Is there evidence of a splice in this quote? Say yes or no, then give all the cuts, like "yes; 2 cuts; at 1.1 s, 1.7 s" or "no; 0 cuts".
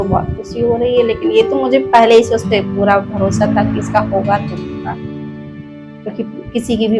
no; 0 cuts